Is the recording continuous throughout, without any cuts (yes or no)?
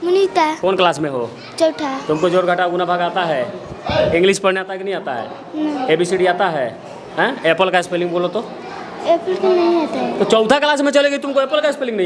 yes